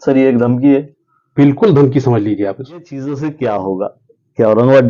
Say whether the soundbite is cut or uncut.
cut